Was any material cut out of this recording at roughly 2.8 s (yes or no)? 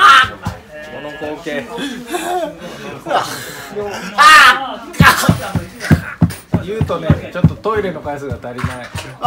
no